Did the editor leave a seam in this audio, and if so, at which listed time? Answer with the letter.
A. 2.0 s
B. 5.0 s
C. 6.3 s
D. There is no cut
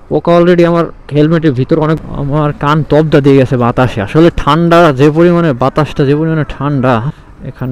A